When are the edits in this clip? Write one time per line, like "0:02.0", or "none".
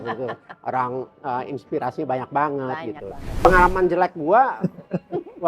0:03.4